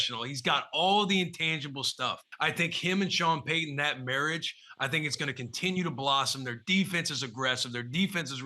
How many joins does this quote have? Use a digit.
1